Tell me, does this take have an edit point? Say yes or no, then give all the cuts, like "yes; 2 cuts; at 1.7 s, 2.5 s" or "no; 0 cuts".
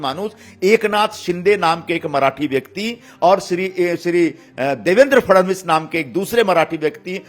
no; 0 cuts